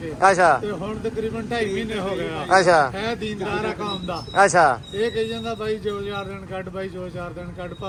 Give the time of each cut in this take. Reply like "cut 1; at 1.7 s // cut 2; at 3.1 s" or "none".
none